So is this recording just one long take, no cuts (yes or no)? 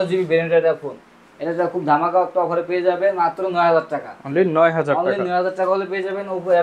yes